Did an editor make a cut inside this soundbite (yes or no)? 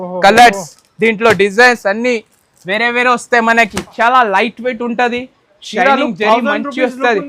yes